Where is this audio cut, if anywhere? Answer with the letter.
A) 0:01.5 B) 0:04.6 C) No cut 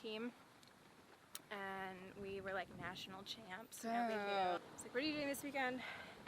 B